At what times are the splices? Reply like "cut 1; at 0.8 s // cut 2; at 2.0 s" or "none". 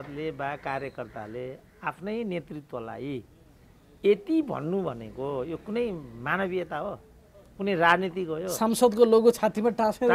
none